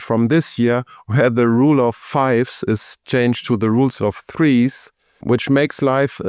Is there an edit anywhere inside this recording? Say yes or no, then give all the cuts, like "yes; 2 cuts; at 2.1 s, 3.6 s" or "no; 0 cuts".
no; 0 cuts